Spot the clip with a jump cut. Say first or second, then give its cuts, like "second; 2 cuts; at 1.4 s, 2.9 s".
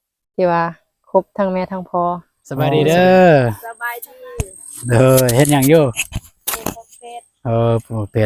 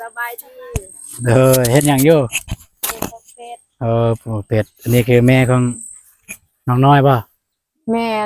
first; 1 cut; at 2.7 s